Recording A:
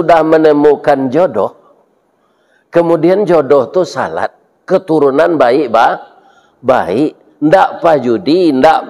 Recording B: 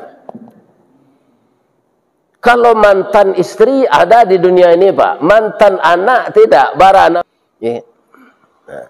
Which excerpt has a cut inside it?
B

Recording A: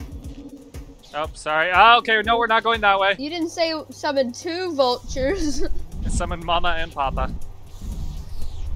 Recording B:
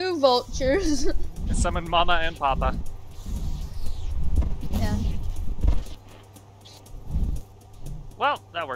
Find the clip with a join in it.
A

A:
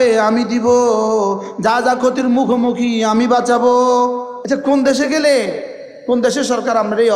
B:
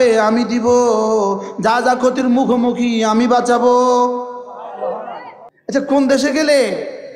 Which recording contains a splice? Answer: A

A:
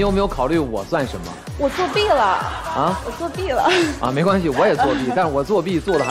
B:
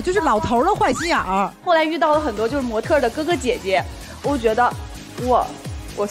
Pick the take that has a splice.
B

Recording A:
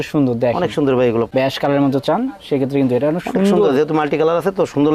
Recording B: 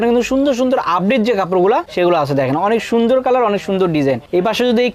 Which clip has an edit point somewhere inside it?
A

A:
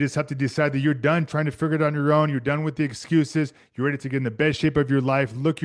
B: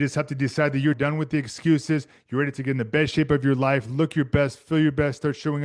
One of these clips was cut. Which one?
B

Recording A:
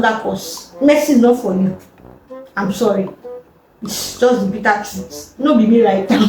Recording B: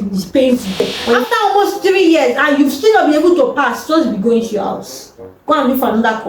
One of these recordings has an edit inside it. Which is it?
B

